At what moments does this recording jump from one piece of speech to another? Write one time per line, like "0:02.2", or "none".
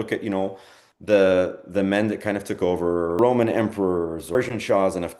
0:03.2
0:04.3